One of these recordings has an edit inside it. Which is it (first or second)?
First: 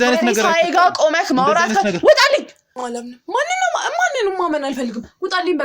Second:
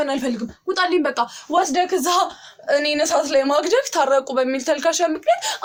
first